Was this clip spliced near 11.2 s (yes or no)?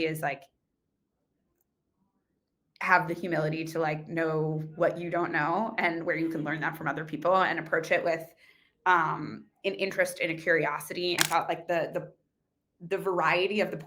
yes